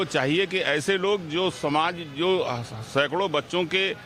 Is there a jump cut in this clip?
no; 0 cuts

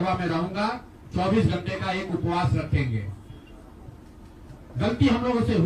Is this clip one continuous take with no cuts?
yes; 0 cuts

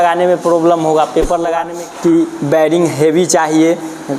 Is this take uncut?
no; 1 cut; at 1.7 s

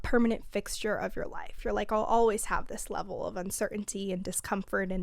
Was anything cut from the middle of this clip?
no; 0 cuts

